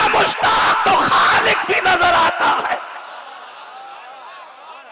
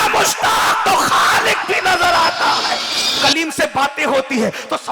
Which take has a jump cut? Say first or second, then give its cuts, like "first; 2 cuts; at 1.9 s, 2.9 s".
second; 1 cut; at 3.1 s